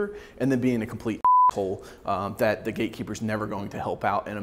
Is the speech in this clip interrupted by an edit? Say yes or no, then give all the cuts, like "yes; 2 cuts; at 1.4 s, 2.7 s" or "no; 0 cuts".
no; 0 cuts